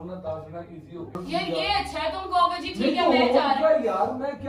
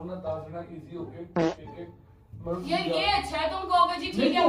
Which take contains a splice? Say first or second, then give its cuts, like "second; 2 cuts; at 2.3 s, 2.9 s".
first; 1 cut; at 1.2 s